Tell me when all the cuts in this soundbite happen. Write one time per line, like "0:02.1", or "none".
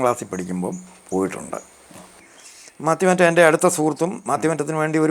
0:02.2